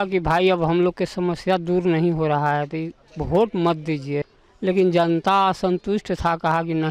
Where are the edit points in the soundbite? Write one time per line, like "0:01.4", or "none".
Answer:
0:04.4